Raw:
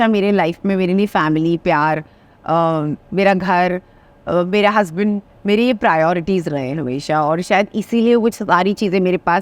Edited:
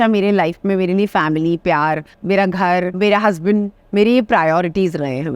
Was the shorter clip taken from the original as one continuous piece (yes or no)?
no